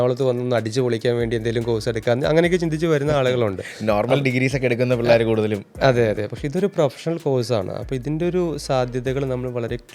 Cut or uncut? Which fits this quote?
uncut